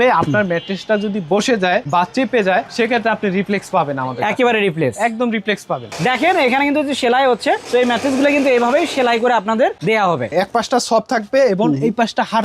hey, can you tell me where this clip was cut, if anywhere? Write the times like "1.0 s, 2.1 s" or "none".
1.9 s, 5.9 s, 10.3 s